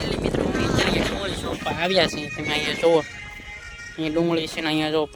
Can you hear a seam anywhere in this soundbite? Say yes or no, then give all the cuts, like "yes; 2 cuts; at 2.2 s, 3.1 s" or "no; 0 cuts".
no; 0 cuts